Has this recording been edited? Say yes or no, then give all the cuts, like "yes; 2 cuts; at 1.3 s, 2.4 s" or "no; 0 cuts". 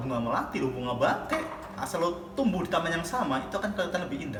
no; 0 cuts